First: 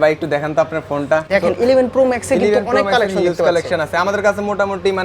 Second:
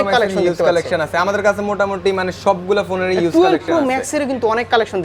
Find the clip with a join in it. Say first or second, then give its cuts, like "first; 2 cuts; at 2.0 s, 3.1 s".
first; 1 cut; at 1.2 s